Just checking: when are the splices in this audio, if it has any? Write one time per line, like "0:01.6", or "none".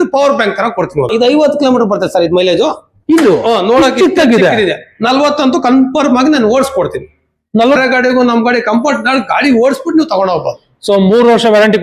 0:01.1
0:07.8